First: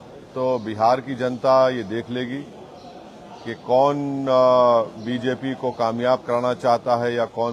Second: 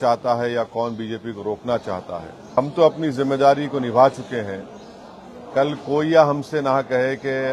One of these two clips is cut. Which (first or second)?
second